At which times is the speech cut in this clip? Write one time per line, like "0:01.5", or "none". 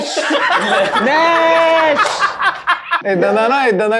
0:02.9